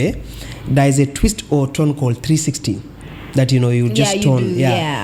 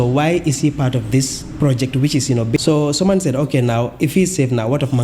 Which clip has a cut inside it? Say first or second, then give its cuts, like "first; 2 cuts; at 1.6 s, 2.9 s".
second; 1 cut; at 2.6 s